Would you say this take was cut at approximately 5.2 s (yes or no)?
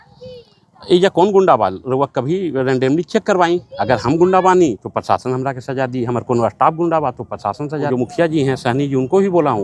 no